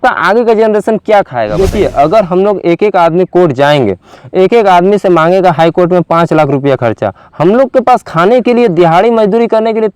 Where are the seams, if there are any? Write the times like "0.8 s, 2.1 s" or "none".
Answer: 1.5 s